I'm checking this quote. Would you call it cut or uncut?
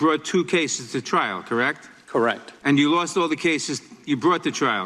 cut